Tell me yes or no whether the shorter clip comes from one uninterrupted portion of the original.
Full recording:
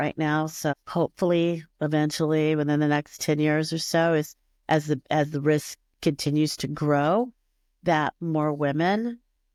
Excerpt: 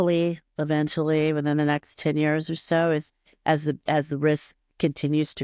yes